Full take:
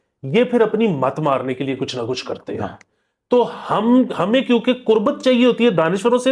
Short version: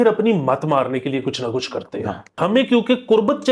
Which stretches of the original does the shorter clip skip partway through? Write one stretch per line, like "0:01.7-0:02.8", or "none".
0:02.9-0:04.1